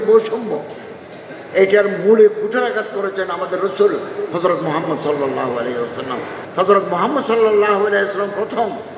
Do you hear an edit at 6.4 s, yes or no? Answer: yes